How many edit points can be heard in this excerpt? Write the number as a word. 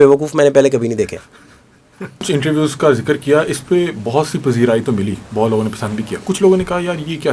one